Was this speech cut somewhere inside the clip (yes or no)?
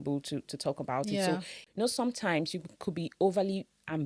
yes